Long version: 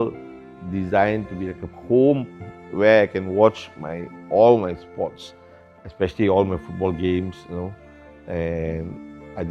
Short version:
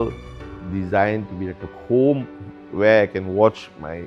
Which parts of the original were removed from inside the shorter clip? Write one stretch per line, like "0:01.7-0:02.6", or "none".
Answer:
none